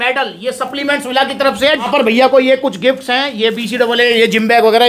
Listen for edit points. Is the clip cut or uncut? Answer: cut